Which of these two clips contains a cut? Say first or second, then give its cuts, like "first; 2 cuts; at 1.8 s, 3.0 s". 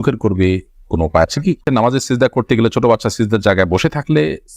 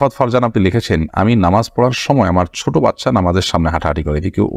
first; 1 cut; at 1.6 s